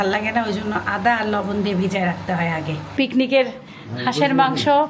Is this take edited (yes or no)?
yes